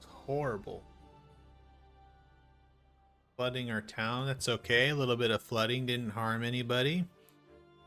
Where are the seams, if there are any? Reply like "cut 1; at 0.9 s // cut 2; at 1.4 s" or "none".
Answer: none